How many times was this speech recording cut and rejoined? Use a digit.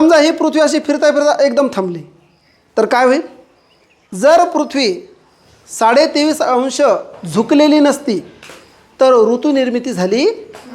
1